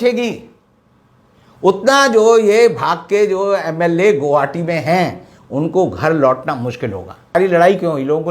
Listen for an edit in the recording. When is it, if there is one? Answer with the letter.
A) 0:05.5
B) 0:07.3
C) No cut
B